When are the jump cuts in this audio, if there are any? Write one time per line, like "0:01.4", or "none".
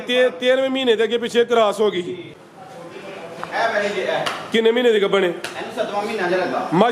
0:02.4